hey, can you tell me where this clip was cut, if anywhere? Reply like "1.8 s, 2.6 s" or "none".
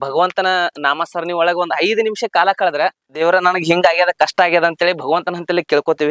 3.2 s